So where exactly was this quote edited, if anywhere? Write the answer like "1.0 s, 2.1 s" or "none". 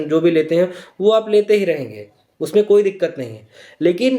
none